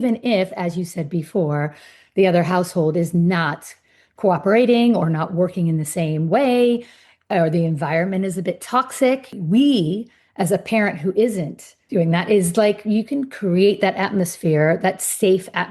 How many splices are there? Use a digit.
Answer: 2